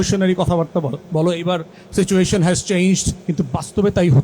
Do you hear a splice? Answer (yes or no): yes